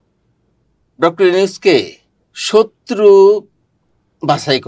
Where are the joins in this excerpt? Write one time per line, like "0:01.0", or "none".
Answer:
none

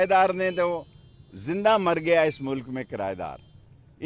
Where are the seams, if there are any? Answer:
none

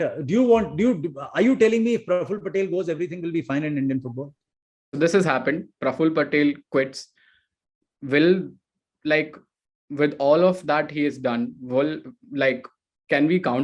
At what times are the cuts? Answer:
0:04.9

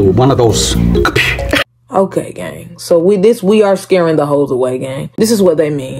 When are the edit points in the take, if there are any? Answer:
0:01.6

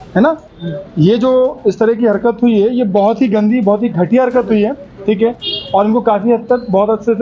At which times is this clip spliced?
none

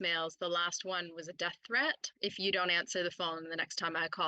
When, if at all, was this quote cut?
0:02.1

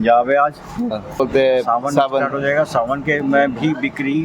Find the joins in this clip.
0:01.2

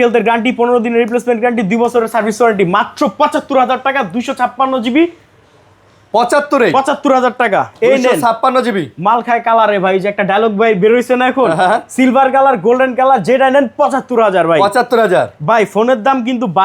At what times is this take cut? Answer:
none

